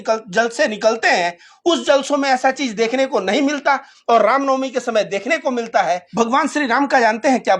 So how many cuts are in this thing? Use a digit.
1